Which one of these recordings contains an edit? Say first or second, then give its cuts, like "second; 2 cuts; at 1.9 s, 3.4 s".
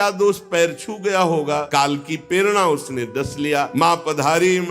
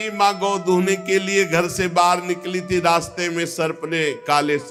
first; 2 cuts; at 1.7 s, 3.7 s